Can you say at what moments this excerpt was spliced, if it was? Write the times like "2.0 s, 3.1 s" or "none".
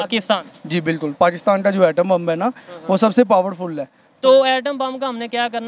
none